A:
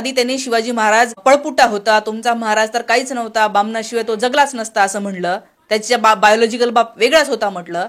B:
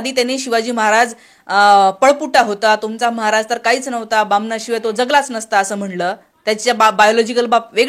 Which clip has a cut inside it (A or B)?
A